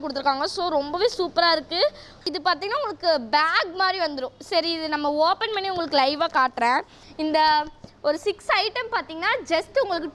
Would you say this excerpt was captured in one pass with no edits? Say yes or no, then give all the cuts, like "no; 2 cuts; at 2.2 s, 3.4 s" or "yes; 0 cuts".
no; 2 cuts; at 2.2 s, 7.0 s